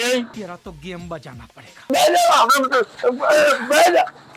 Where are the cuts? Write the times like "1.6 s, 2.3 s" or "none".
1.9 s